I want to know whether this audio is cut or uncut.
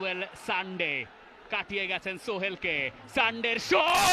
uncut